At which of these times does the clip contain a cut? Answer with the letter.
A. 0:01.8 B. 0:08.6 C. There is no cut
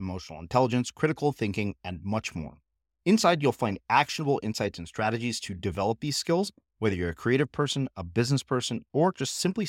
C